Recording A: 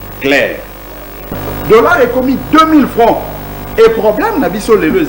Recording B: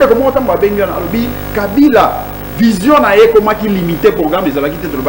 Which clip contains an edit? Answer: A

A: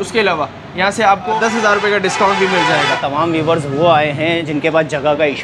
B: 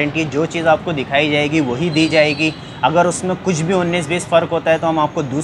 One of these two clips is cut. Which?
A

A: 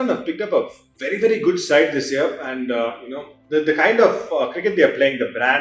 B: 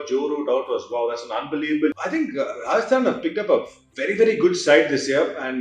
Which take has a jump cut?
B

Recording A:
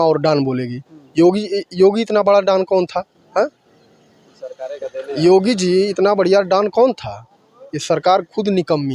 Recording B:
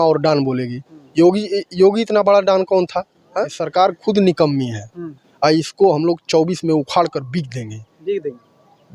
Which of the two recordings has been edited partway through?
B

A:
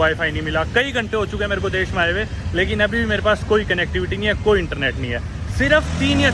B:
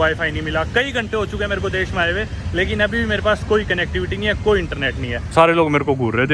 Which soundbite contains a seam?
B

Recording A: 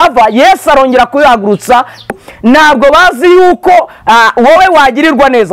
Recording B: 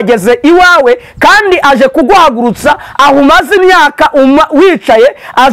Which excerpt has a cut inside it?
A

